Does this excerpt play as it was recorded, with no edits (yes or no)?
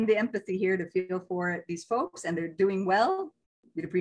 yes